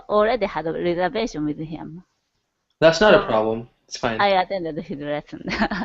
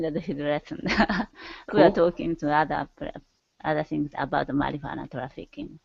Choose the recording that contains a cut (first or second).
first